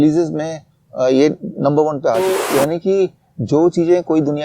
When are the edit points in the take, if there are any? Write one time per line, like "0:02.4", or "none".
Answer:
0:02.2

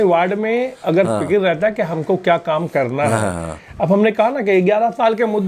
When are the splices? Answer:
none

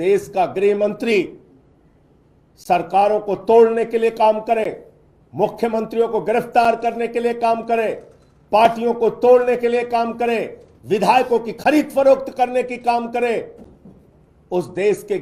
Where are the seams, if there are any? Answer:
none

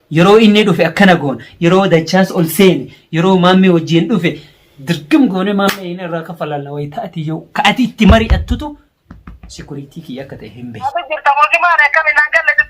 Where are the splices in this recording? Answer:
0:10.9

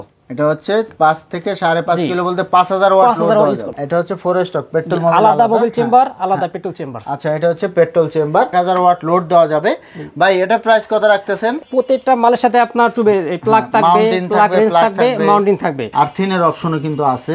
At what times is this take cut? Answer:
0:03.7
0:08.5
0:11.6
0:15.8

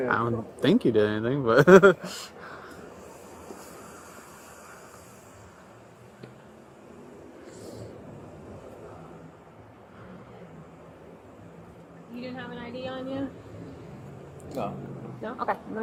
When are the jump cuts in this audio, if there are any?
none

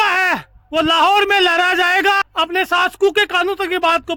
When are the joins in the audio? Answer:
0:02.2

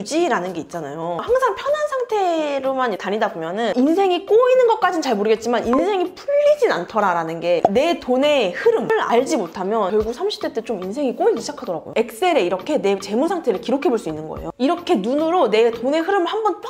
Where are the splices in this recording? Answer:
0:01.2
0:07.6
0:08.9
0:11.8

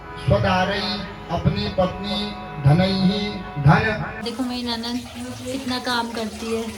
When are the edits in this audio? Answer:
0:04.2

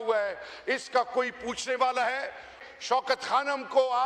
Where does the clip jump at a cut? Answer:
0:02.5

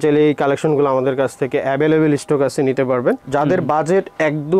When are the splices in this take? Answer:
0:03.2

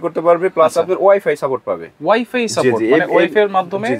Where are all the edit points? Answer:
none

